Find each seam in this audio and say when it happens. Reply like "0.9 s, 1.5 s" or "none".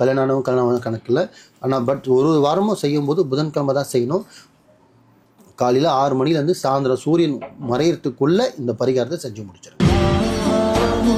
9.6 s